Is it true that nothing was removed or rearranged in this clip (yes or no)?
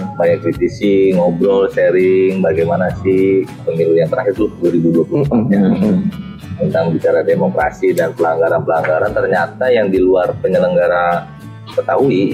no